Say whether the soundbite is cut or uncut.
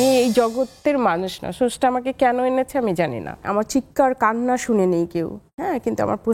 cut